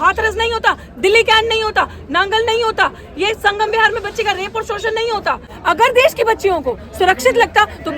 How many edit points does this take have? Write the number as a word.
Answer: one